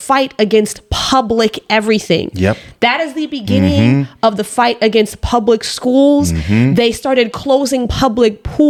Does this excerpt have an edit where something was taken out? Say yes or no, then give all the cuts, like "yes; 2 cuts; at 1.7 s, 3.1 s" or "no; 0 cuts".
no; 0 cuts